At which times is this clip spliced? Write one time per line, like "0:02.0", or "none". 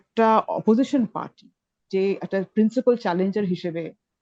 none